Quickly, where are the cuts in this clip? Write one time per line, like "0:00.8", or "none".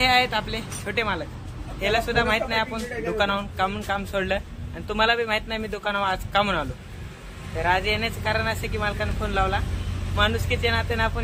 none